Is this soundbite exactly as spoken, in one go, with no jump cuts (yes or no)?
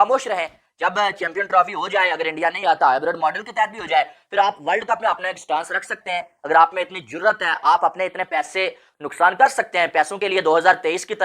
yes